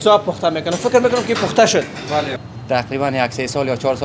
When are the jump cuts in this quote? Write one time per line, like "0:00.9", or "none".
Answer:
0:02.4